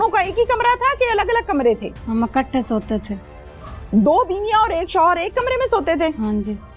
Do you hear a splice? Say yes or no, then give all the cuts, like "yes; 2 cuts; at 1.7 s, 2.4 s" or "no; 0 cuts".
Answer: yes; 1 cut; at 1.9 s